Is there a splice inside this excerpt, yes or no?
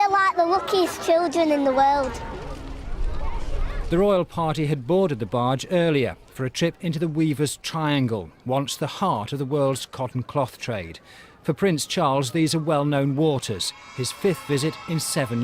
yes